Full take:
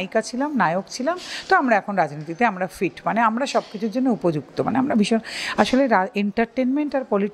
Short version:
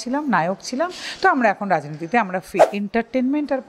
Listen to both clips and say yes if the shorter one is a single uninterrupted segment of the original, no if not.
no